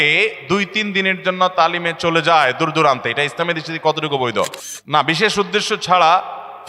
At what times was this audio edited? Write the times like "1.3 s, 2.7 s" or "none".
4.7 s